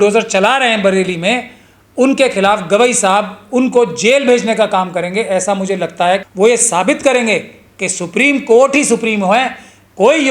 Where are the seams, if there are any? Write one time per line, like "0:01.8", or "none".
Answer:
0:06.2